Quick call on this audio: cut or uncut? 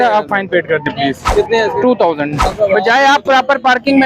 cut